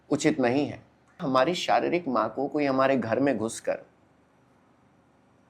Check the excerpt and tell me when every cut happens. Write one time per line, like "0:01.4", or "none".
0:01.1